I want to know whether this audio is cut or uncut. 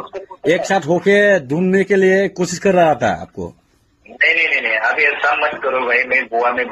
uncut